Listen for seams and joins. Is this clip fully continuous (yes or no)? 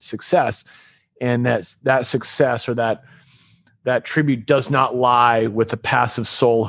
yes